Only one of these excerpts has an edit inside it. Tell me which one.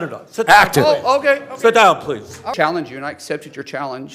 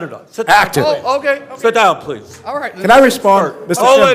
first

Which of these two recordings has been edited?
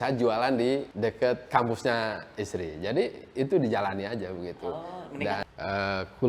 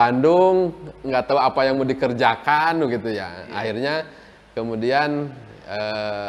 first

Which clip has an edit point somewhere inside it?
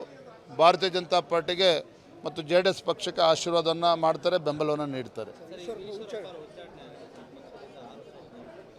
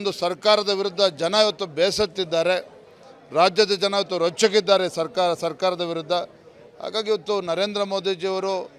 first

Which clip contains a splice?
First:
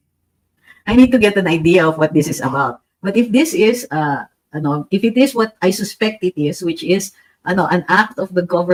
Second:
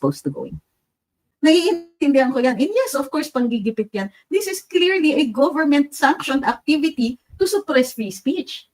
second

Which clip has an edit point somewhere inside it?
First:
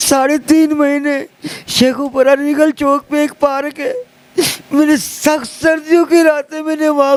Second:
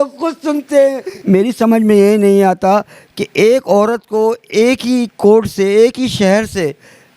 second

